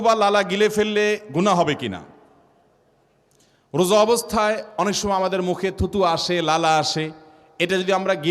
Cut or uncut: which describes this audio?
uncut